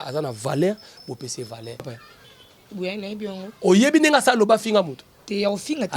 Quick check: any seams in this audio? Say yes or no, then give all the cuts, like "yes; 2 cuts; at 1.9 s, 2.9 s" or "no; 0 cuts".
yes; 1 cut; at 2.0 s